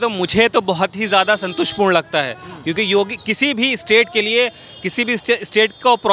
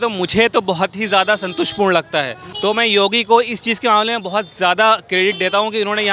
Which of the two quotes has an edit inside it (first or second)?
second